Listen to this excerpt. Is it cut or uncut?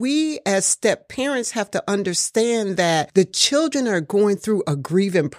uncut